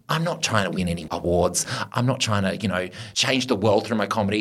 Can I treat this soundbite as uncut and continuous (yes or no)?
yes